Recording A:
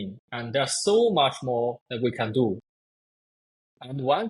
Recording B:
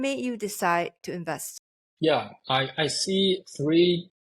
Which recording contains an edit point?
B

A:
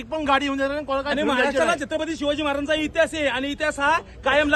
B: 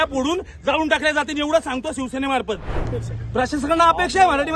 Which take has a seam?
B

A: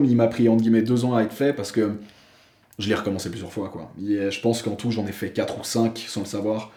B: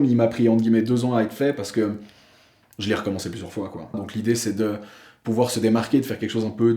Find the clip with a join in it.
B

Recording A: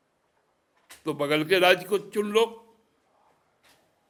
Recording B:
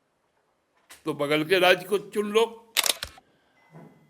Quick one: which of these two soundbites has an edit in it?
B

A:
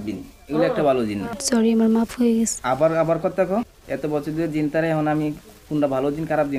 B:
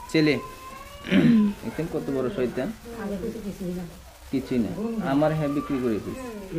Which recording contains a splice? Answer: A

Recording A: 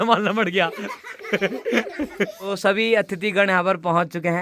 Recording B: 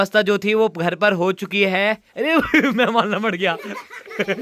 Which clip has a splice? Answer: A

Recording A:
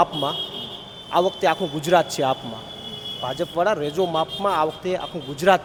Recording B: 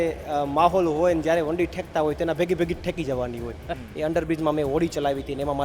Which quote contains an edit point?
B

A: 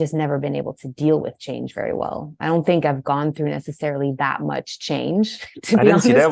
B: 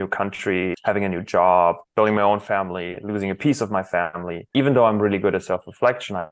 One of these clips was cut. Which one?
B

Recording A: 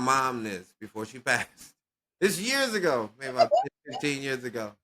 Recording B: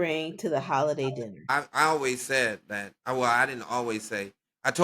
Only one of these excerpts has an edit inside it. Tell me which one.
B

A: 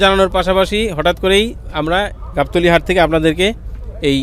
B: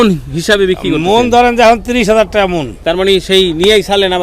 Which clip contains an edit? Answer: B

